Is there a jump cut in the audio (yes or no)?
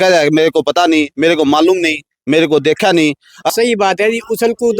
yes